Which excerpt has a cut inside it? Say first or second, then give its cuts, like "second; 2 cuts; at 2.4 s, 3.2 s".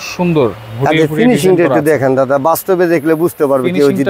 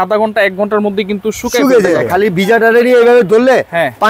second; 1 cut; at 2.1 s